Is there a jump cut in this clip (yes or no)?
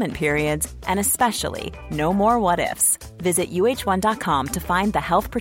no